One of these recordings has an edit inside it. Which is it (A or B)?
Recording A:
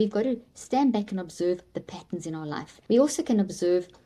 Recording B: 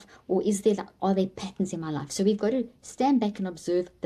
A